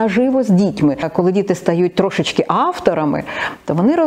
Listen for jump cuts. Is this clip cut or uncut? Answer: cut